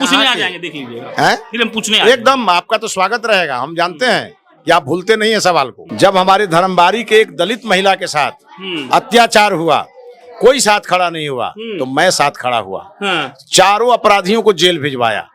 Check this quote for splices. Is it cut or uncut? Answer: cut